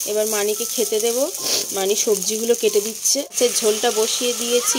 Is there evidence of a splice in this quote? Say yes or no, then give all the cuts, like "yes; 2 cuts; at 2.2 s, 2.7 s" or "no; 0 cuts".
yes; 1 cut; at 3.3 s